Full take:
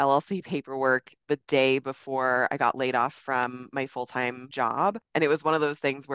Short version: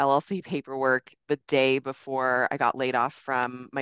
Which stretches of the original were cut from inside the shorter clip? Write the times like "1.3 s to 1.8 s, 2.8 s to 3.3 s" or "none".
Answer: none